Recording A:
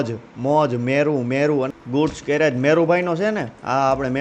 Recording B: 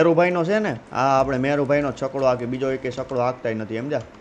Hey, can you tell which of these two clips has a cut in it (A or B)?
A